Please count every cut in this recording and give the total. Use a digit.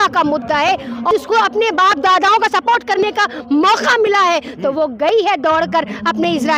1